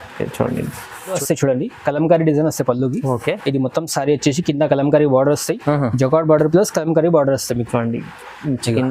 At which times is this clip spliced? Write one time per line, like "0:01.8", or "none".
0:01.2

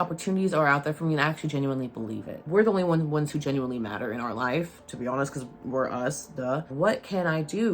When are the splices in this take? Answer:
0:02.4
0:06.7

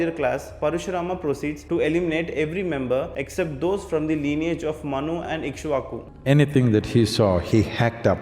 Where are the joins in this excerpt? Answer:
0:06.0

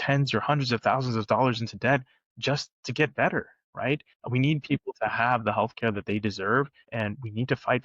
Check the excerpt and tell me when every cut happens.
0:04.2
0:06.8

